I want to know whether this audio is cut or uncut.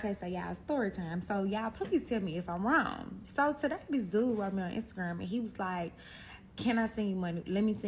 uncut